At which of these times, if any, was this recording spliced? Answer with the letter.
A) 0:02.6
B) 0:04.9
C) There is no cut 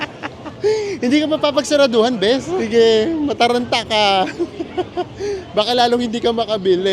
A